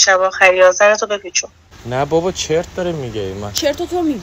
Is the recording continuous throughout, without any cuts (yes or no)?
no